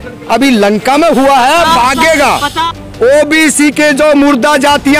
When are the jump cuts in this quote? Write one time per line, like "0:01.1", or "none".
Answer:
0:02.6

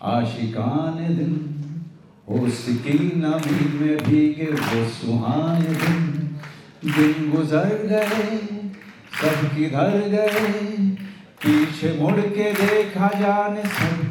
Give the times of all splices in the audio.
none

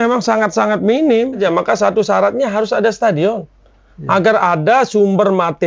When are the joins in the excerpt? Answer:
0:01.4

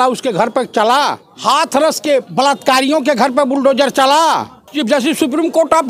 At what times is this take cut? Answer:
0:01.3
0:04.6

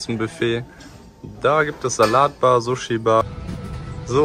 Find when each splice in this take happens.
0:03.2

